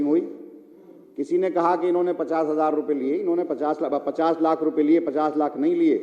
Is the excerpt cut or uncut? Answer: uncut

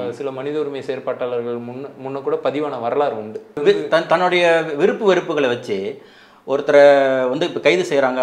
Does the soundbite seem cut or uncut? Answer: cut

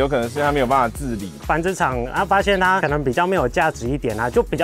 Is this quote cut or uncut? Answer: cut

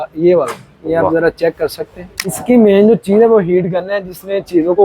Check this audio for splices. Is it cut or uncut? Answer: cut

